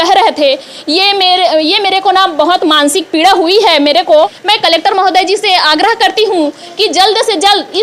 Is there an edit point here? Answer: yes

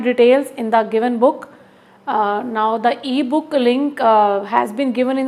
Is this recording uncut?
yes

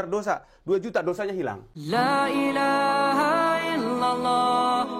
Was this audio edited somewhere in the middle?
yes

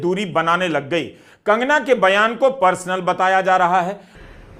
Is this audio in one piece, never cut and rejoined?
yes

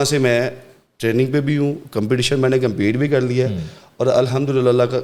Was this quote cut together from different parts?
no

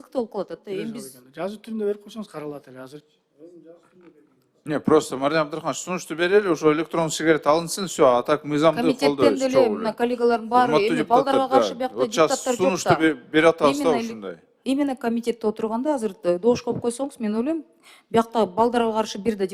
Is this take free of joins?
yes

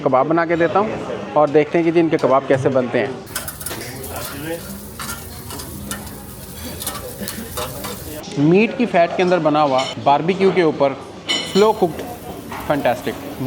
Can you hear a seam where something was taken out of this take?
yes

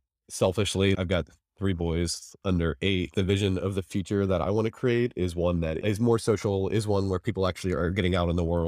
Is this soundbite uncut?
no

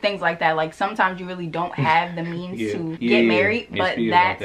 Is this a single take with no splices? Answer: yes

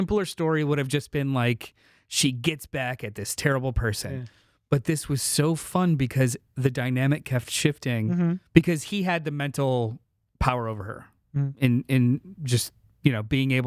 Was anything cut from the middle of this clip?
no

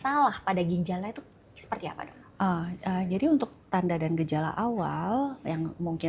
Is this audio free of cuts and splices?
yes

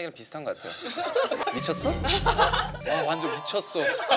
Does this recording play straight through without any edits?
yes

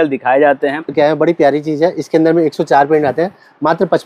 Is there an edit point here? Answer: yes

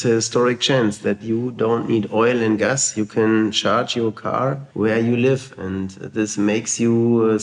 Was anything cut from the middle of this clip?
no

